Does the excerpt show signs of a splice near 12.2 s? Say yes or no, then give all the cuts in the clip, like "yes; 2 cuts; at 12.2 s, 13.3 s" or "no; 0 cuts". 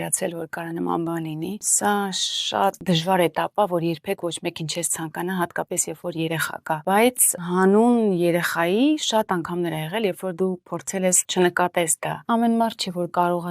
yes; 5 cuts; at 1.6 s, 2.8 s, 6.8 s, 11.2 s, 12.2 s